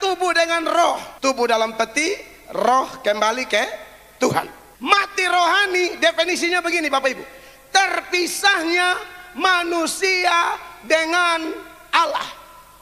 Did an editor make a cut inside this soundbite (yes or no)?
yes